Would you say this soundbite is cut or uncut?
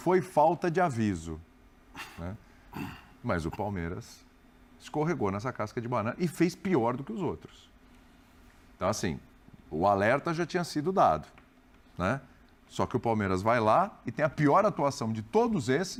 uncut